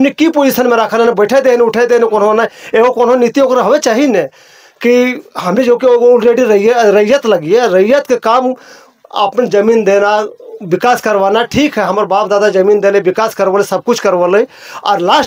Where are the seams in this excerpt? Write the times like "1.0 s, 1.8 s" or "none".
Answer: none